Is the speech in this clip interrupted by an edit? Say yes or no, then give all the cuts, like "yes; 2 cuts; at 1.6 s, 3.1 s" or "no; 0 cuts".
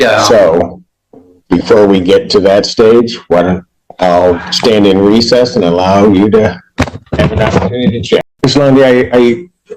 yes; 1 cut; at 8.3 s